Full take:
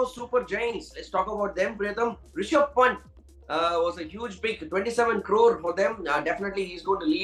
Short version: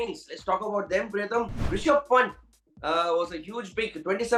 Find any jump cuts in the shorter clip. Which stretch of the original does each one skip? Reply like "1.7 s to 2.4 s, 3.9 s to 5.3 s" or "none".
none